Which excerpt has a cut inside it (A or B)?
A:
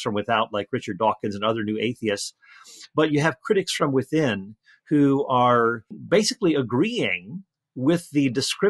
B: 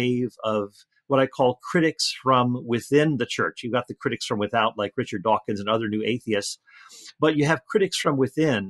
A